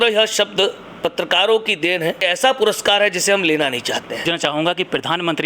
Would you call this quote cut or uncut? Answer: cut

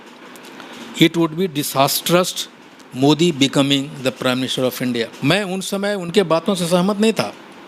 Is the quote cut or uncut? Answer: cut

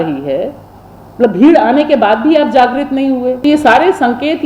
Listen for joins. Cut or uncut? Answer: cut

